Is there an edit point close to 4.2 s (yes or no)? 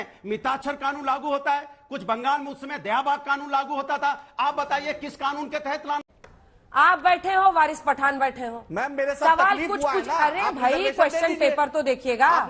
no